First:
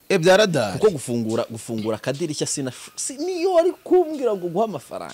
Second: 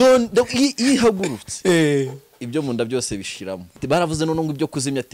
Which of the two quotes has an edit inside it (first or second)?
second